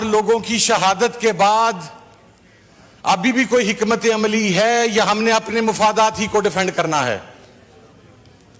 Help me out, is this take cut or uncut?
uncut